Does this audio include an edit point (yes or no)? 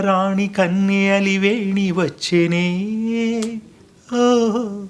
no